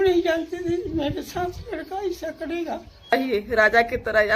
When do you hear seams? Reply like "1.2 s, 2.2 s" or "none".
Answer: 3.1 s

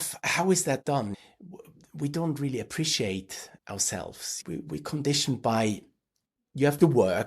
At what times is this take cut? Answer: 1.2 s

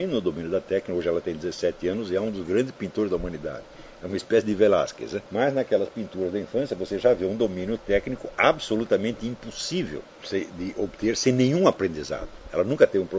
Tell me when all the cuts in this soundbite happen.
5.2 s, 10.1 s

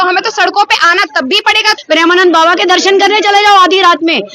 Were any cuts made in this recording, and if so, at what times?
1.8 s

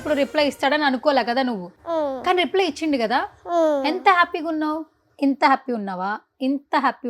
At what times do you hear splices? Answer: 1.7 s

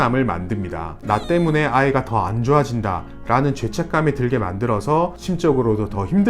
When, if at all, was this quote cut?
1.0 s

